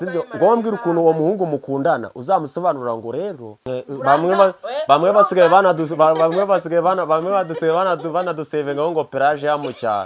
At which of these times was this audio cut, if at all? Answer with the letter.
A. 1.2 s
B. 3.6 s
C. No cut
B